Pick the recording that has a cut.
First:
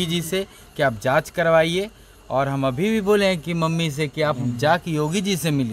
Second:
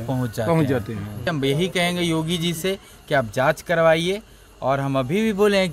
second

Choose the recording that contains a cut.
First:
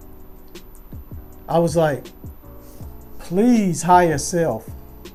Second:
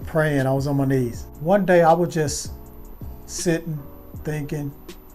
second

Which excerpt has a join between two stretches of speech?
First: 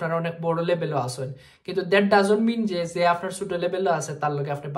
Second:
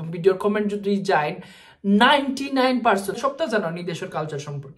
second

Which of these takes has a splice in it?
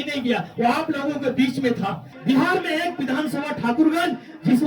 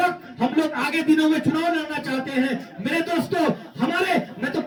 first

